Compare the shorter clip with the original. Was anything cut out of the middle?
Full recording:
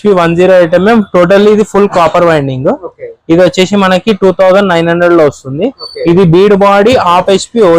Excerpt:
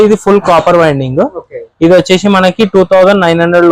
no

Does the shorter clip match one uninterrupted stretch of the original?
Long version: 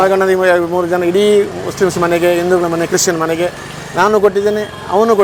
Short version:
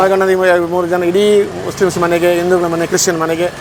yes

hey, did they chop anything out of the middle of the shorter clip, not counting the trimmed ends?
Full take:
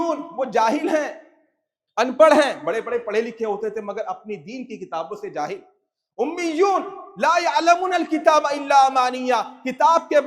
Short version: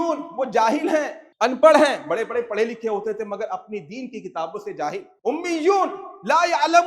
yes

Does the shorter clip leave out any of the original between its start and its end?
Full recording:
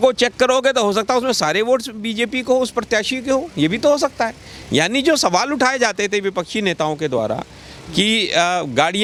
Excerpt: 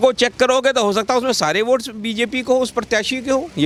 no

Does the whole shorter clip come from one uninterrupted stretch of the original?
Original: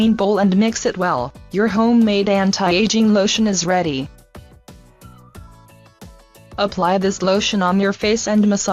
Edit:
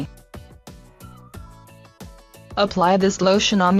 yes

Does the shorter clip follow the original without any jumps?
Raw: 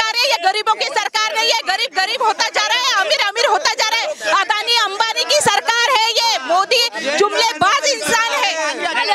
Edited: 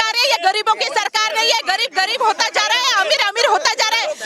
yes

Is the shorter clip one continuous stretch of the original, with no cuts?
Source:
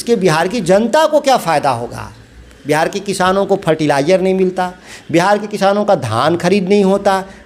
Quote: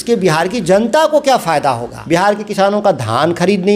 no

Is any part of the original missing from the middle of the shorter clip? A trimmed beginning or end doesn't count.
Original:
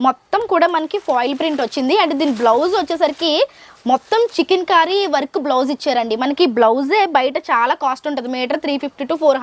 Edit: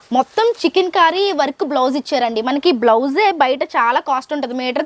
no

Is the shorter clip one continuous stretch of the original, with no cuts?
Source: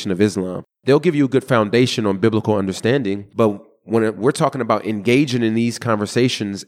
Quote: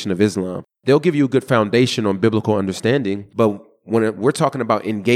yes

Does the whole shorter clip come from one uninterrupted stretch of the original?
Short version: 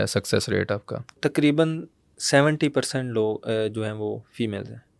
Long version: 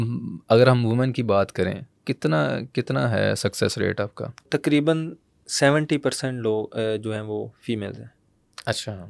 yes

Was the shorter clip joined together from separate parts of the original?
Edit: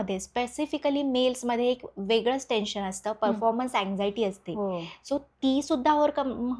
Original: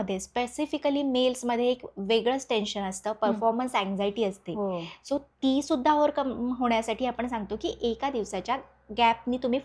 no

